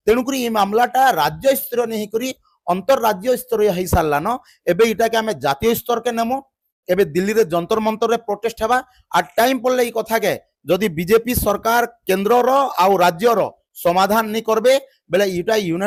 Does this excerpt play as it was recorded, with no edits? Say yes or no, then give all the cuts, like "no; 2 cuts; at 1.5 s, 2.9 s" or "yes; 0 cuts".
yes; 0 cuts